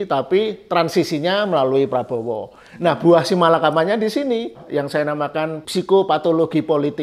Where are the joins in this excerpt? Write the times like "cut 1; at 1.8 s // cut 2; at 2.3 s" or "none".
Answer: cut 1; at 4.6 s // cut 2; at 5.6 s